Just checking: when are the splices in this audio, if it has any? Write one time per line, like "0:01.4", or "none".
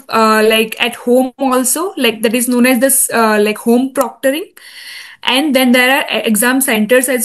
none